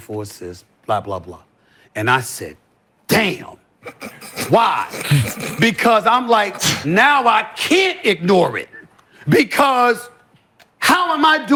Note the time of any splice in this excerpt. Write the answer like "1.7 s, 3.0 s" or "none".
none